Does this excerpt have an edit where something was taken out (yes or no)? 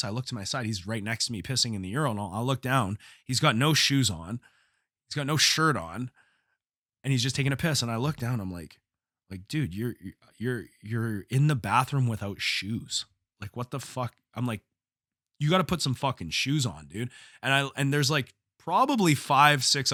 no